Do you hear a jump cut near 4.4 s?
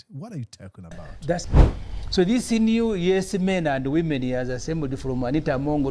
no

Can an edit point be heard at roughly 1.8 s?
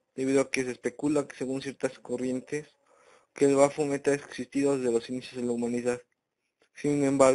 no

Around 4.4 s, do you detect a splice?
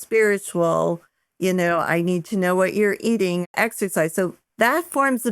yes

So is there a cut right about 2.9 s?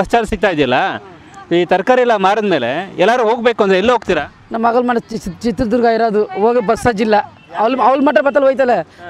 no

